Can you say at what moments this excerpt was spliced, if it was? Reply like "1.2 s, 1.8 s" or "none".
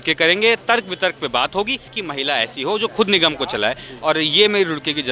2.0 s